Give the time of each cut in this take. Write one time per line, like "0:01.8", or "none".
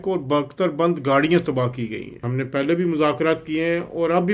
0:02.3